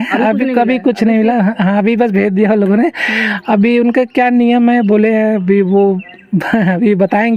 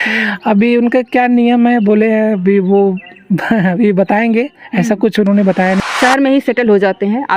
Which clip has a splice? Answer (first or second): second